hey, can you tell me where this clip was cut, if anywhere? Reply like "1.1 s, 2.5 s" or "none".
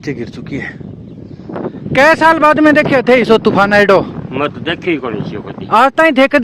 1.7 s